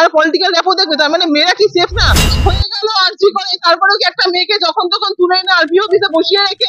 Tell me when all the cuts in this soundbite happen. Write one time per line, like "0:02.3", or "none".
0:02.2